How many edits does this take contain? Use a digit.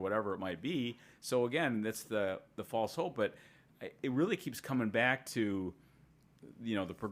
0